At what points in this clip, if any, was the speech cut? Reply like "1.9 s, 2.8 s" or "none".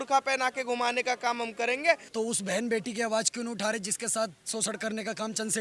2.1 s